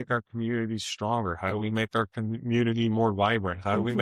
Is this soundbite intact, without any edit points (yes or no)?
yes